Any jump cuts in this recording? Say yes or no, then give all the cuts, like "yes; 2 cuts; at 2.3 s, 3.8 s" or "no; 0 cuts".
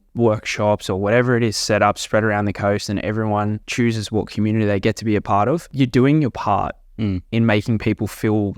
yes; 1 cut; at 3.6 s